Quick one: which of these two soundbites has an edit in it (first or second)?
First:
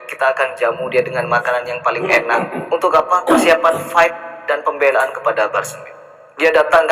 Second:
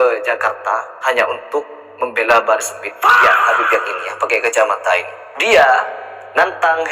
second